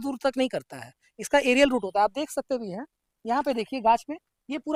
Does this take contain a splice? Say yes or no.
no